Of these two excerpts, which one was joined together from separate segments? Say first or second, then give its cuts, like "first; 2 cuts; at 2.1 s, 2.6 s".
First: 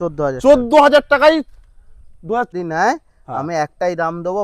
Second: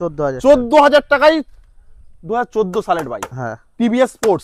first; 1 cut; at 2.5 s